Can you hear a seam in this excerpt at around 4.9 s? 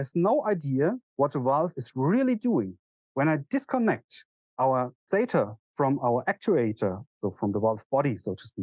no; 1 cut; at 1.0 s

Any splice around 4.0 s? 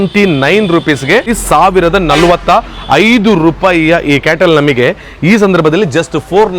no; 1 cut; at 1.3 s

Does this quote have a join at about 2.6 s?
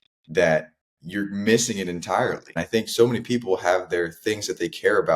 yes; 1 cut; at 2.6 s

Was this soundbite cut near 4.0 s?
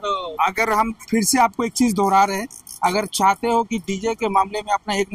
no; 0 cuts

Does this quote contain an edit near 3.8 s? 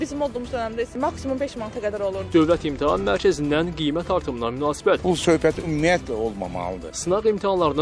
no; 3 cuts; at 2.2 s, 5.0 s, 6.8 s

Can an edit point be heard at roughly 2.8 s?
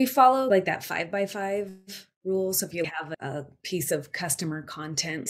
yes; 1 cut; at 2.8 s

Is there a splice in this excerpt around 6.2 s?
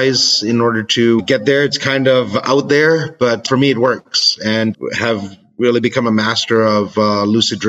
no; 3 cuts; at 1.2 s, 3.4 s, 4.7 s

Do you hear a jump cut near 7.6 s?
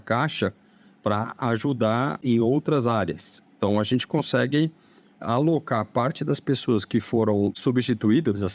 yes; 2 cuts; at 2.2 s, 7.6 s

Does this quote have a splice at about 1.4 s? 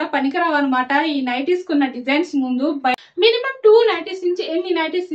no; 1 cut; at 3.0 s

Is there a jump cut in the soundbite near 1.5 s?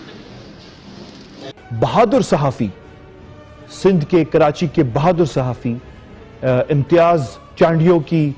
yes; 1 cut; at 1.5 s

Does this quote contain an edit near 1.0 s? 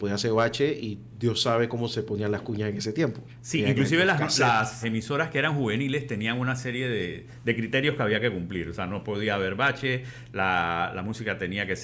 no; 2 cuts; at 3.3 s, 4.8 s

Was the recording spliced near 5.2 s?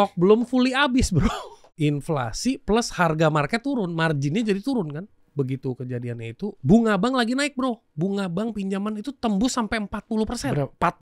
yes; 3 cuts; at 1.6 s, 5.2 s, 6.6 s

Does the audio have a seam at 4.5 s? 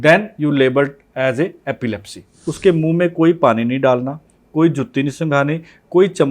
no; 1 cut; at 2.4 s

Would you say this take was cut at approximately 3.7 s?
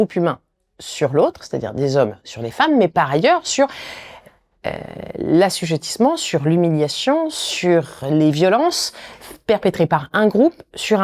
no; 0 cuts

